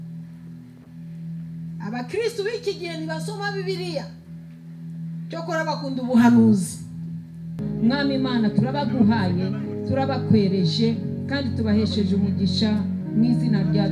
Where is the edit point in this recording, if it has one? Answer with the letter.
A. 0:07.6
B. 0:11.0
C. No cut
A